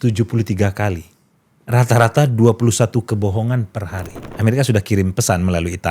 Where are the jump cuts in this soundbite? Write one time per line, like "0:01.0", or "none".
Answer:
0:04.2